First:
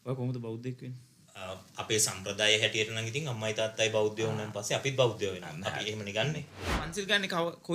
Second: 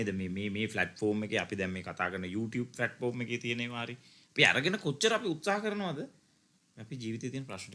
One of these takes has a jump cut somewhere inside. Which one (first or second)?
first